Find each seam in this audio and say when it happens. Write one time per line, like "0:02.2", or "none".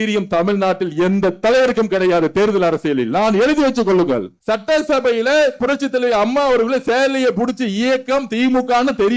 0:04.3